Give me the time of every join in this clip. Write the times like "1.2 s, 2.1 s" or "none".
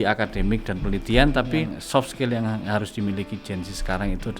1.8 s